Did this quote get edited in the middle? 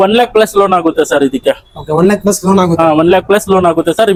no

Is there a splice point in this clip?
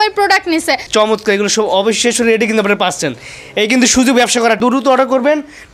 yes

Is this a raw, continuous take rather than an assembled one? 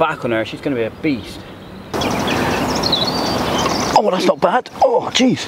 no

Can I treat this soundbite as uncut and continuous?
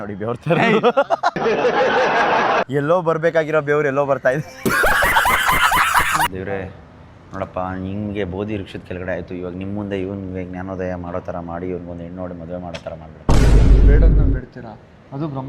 no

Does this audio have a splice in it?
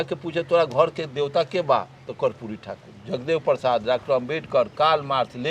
no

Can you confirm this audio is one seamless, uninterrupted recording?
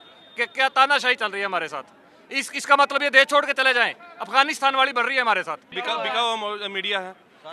no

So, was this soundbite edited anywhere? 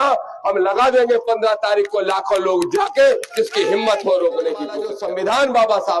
yes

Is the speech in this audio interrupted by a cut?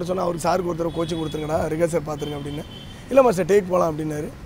no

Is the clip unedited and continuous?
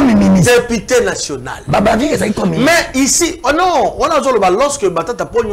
yes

